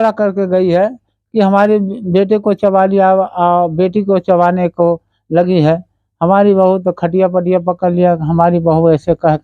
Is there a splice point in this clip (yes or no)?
no